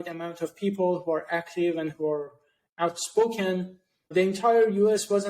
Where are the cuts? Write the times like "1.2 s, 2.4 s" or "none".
4.1 s